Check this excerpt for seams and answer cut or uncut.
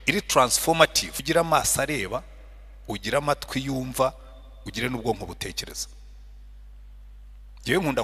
cut